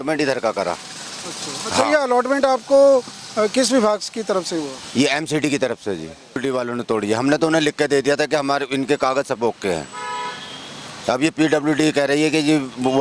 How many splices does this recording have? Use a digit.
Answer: 1